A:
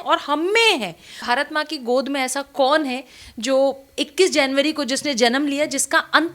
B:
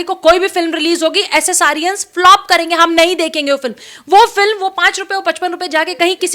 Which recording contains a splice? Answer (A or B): A